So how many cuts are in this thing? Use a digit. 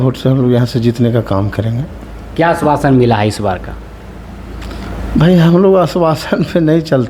0